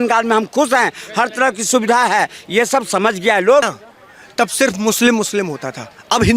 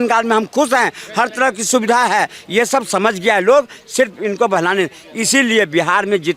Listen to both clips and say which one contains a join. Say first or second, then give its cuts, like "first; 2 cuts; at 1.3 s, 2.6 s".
first; 1 cut; at 3.8 s